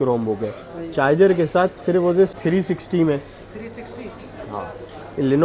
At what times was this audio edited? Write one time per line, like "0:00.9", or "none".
0:02.4